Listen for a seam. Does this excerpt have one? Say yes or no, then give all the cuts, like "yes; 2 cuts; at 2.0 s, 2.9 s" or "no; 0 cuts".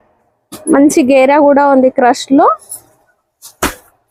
no; 0 cuts